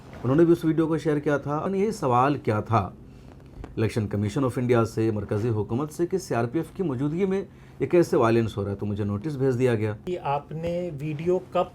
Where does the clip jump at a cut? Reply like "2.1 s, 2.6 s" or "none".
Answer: 1.7 s, 10.0 s